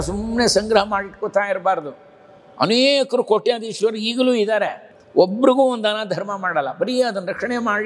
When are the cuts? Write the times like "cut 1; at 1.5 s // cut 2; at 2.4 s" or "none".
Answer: cut 1; at 4.8 s